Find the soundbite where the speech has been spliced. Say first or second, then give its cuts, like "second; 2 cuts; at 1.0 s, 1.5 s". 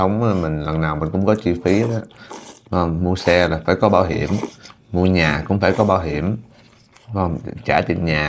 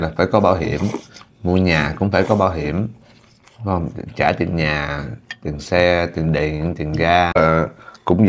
second; 1 cut; at 7.4 s